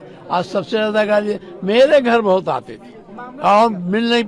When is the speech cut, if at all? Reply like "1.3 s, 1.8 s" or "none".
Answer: none